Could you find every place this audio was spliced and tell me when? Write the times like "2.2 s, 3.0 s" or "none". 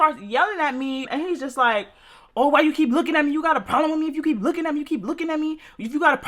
1.1 s